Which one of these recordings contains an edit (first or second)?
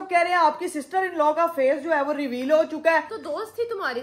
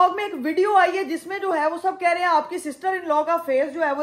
first